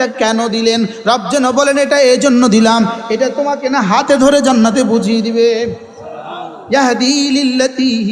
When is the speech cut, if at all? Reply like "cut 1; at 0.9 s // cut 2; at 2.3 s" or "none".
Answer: none